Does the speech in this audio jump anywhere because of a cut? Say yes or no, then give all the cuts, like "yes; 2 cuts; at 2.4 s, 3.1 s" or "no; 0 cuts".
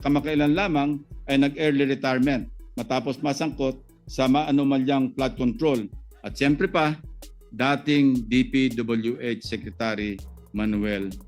no; 0 cuts